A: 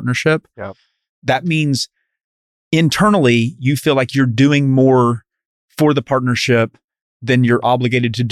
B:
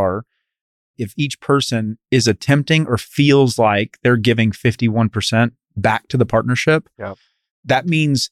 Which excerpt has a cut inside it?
B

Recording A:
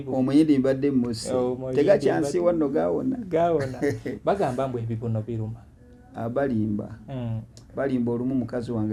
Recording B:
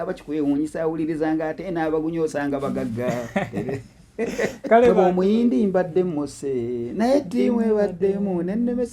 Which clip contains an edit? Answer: B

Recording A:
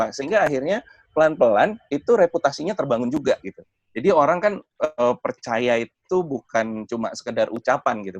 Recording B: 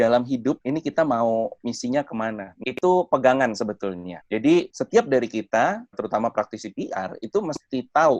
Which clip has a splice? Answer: B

